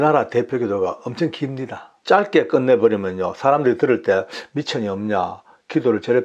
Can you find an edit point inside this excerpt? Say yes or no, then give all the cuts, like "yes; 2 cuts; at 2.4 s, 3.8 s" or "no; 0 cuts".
yes; 1 cut; at 1.9 s